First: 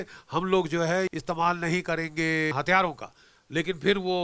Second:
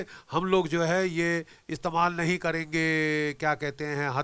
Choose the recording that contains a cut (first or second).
first